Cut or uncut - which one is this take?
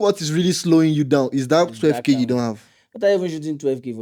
uncut